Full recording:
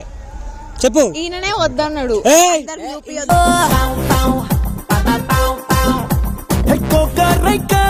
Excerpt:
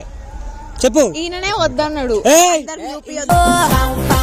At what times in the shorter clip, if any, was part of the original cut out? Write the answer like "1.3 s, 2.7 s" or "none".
none